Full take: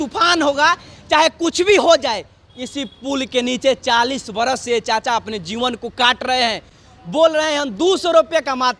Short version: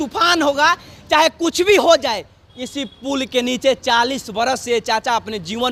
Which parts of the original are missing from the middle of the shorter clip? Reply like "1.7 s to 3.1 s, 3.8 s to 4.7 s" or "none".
none